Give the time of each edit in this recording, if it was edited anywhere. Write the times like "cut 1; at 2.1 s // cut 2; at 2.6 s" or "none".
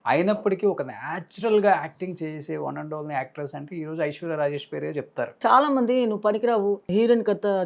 cut 1; at 5.4 s // cut 2; at 6.9 s

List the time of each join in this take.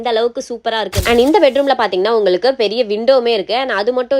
cut 1; at 1.0 s

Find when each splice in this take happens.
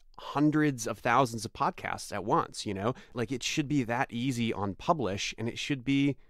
cut 1; at 3.1 s

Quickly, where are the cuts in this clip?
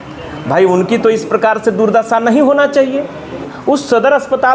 cut 1; at 3.5 s

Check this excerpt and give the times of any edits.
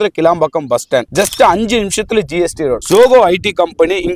cut 1; at 1.1 s // cut 2; at 2.8 s

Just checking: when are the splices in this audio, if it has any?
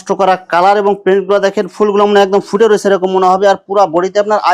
none

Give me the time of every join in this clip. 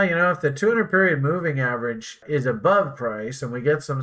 cut 1; at 2.2 s

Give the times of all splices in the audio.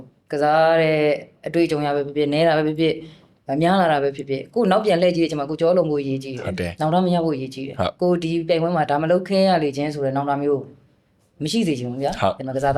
none

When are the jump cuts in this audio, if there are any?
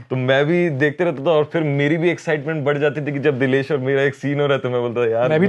none

